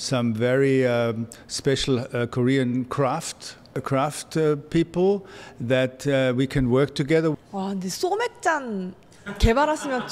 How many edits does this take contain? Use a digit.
1